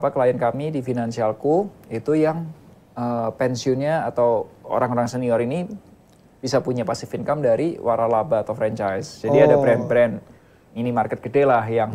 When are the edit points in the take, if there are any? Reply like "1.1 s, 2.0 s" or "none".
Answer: none